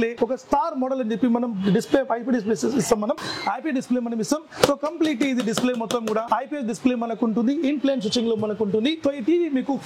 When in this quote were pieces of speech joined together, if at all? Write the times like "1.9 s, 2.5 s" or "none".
none